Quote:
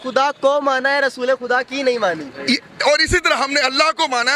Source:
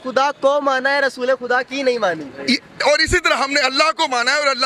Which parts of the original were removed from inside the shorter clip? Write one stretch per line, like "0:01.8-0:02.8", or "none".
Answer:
none